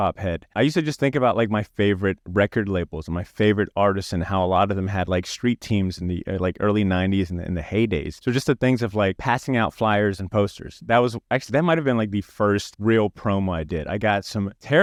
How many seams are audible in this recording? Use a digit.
0